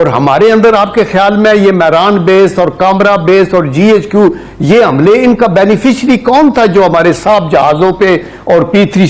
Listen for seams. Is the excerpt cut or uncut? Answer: uncut